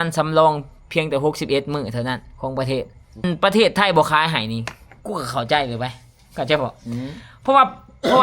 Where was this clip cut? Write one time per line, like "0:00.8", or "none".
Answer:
0:03.2